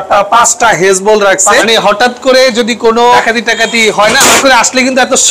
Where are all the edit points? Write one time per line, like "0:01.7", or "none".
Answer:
0:01.6
0:03.2
0:04.4